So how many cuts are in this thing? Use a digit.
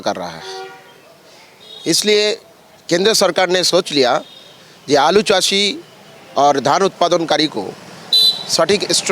0